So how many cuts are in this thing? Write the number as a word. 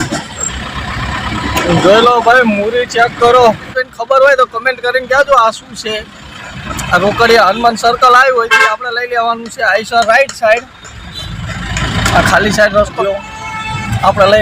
two